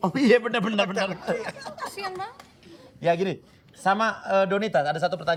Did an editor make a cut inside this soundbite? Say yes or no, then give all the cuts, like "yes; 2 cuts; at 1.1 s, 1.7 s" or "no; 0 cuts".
no; 0 cuts